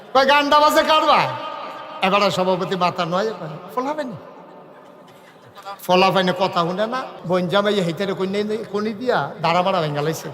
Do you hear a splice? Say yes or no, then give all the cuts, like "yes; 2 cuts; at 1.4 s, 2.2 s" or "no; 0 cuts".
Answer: yes; 1 cut; at 7.1 s